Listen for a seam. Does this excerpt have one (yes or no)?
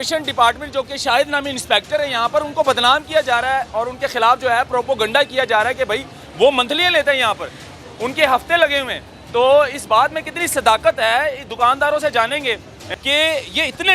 yes